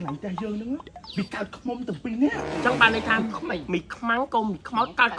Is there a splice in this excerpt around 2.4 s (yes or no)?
yes